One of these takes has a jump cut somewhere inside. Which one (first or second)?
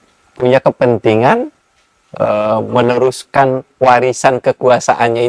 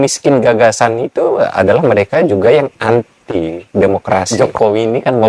second